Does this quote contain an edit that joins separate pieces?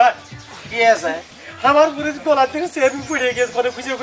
no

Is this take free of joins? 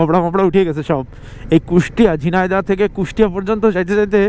yes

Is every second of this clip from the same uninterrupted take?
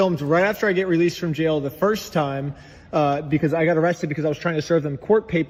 yes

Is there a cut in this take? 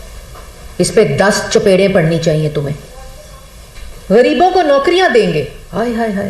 yes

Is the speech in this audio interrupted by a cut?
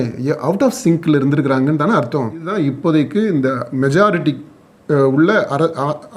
yes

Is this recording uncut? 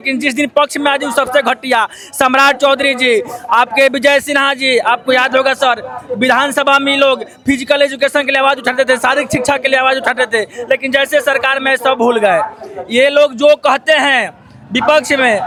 yes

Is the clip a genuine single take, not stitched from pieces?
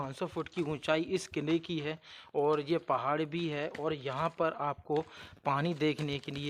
yes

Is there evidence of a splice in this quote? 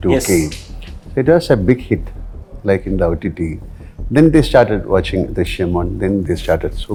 no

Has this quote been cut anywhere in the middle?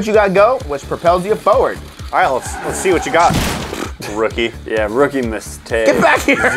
yes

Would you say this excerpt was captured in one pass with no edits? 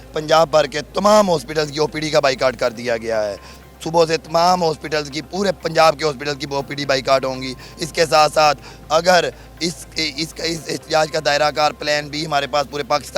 yes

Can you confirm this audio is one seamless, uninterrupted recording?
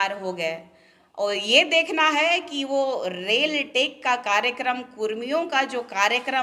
yes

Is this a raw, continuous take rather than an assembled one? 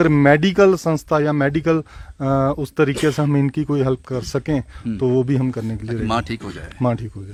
yes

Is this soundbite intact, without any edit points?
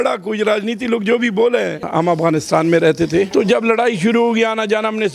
no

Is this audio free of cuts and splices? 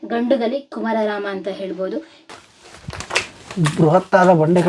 no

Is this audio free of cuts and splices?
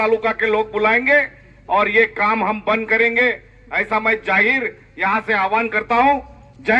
yes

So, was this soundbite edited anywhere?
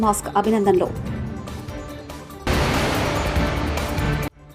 no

